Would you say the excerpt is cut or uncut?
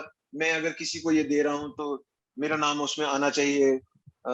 uncut